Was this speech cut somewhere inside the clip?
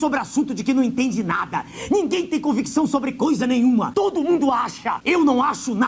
yes; 2 cuts; at 3.9 s, 4.9 s

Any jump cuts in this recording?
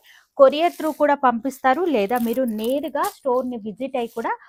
no; 0 cuts

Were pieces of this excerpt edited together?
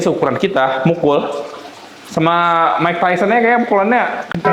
no; 0 cuts

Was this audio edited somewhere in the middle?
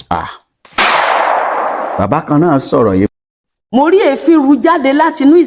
yes; 1 cut; at 3.1 s

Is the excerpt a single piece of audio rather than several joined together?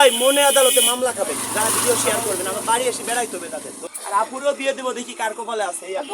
no; 1 cut; at 3.8 s

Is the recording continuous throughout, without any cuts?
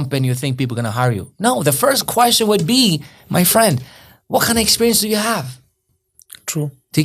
yes; 0 cuts

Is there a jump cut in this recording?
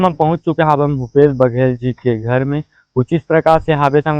no; 0 cuts

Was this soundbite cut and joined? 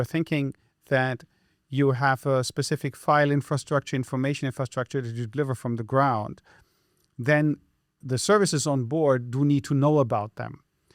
no; 0 cuts

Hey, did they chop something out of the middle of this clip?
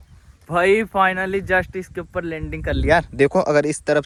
no; 0 cuts

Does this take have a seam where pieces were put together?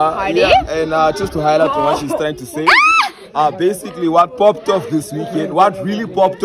no; 0 cuts

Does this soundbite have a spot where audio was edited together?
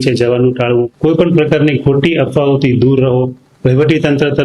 yes; 1 cut; at 0.9 s

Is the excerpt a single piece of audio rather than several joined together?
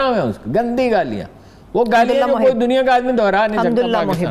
yes; 0 cuts

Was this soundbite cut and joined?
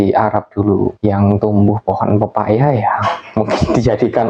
yes; 1 cut; at 1.0 s

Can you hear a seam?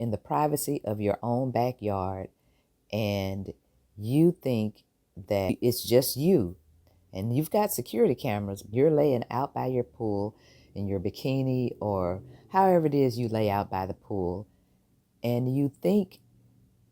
yes; 2 cuts; at 5.5 s, 8.6 s

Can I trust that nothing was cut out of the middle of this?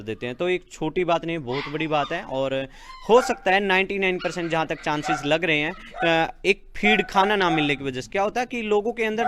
yes; 0 cuts

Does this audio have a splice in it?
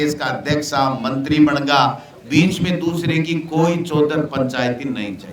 yes; 1 cut; at 2.1 s

